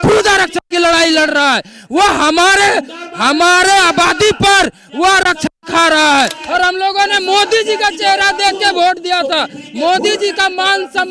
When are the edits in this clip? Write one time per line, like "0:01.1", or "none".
0:06.4